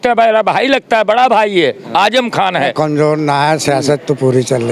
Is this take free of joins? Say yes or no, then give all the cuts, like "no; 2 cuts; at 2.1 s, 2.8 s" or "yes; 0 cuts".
no; 1 cut; at 2.7 s